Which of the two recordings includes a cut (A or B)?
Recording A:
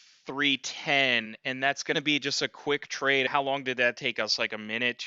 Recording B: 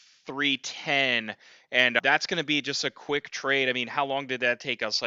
A